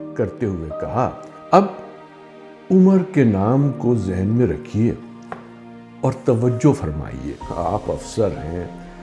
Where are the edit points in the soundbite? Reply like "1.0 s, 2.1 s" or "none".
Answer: 1.3 s, 7.4 s